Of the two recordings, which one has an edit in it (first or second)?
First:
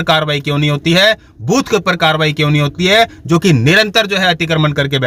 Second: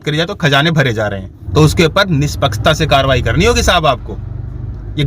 second